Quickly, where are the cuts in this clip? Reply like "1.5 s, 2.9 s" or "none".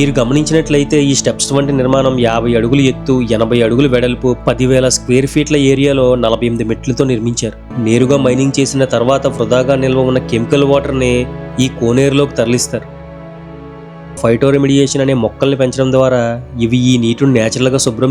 7.7 s, 14.2 s